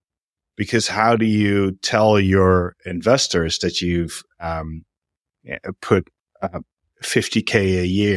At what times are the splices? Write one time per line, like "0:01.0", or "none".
none